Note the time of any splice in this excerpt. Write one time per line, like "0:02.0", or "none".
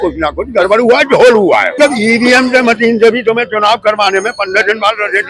0:01.7